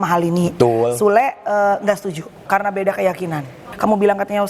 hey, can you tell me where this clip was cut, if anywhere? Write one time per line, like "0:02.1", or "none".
0:02.4
0:03.7